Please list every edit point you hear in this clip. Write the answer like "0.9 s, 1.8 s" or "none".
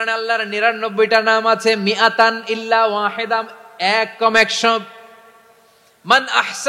none